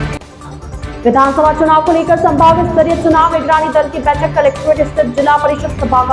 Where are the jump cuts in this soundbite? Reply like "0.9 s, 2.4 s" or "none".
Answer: none